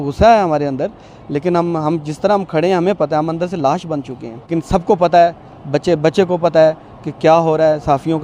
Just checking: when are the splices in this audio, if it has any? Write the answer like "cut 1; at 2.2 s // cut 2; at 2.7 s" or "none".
cut 1; at 4.5 s

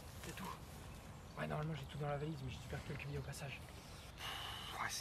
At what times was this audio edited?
none

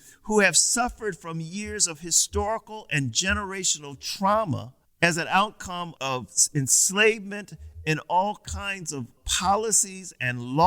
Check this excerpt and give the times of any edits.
cut 1; at 9.2 s

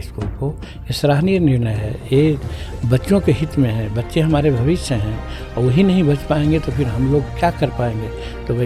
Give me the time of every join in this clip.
none

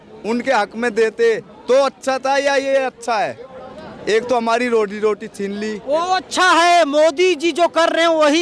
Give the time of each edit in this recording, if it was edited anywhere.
none

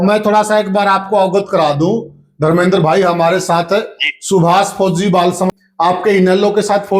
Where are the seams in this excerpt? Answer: cut 1; at 5.5 s

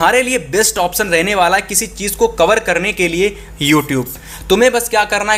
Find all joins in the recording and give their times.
none

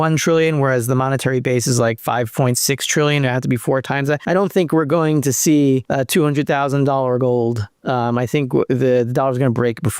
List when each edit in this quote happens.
cut 1; at 2.0 s // cut 2; at 4.2 s // cut 3; at 5.9 s

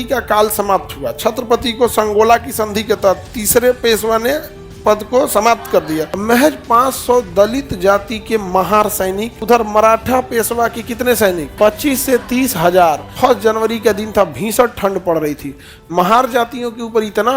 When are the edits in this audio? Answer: cut 1; at 6.1 s // cut 2; at 9.3 s // cut 3; at 11.5 s // cut 4; at 13.1 s

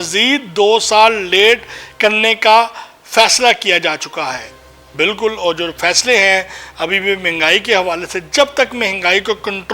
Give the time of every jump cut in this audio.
none

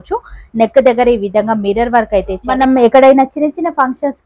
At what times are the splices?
cut 1; at 2.5 s

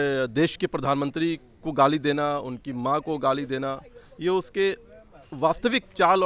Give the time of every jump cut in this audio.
none

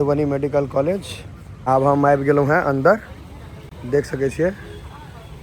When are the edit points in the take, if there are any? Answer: cut 1; at 1.6 s

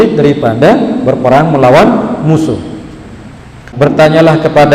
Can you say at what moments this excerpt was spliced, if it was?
cut 1; at 3.6 s

